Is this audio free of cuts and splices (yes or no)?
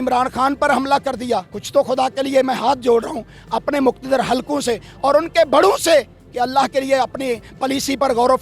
yes